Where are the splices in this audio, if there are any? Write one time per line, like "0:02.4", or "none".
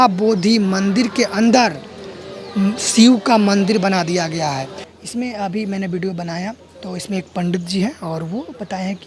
none